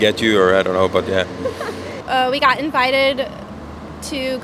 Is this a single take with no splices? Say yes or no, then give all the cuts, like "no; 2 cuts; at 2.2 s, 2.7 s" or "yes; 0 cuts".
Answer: no; 1 cut; at 1.9 s